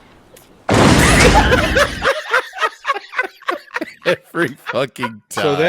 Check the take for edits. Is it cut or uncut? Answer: uncut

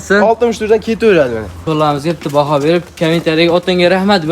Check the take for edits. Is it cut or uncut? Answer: cut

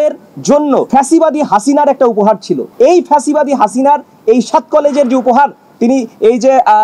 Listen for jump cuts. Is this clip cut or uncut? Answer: uncut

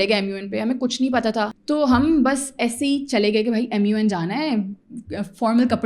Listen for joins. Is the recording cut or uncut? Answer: cut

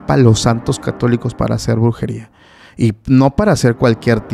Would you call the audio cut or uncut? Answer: uncut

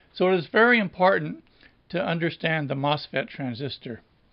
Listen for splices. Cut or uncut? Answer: cut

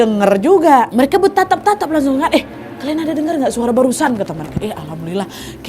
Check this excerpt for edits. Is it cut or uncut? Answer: cut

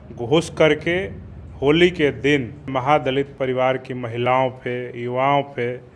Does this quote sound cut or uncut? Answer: cut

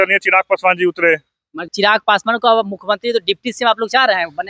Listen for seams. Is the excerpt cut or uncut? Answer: cut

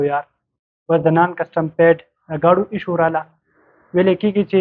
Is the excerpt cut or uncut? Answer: uncut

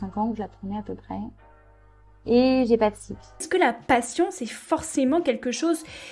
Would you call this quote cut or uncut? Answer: cut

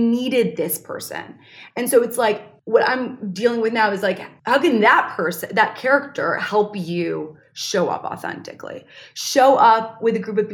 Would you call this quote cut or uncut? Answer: cut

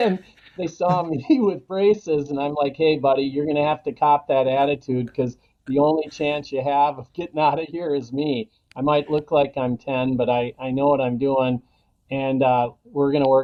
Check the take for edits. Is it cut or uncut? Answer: uncut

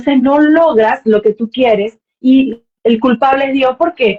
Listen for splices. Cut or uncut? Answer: cut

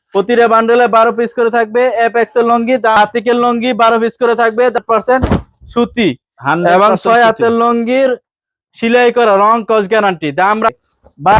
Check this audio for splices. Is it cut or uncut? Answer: cut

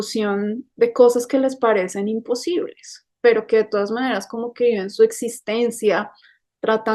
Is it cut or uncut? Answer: cut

